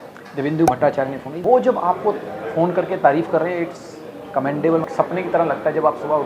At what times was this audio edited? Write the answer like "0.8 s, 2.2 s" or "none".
1.3 s, 4.8 s